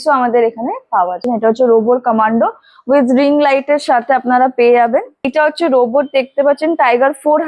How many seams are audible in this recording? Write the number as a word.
two